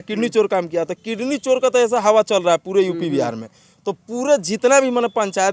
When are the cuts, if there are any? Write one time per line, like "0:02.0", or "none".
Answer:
none